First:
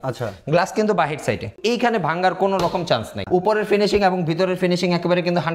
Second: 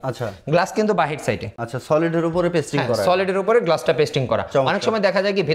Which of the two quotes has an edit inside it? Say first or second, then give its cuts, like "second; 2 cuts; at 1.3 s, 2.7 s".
first; 2 cuts; at 1.6 s, 3.2 s